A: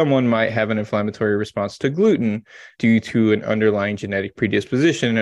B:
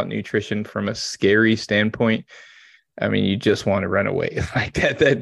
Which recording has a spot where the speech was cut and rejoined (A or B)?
A